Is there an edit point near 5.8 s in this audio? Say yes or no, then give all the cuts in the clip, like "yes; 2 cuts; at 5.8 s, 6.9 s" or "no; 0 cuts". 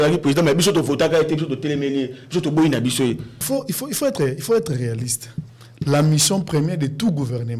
no; 1 cut; at 3.4 s